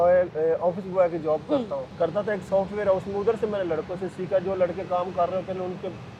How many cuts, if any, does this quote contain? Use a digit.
1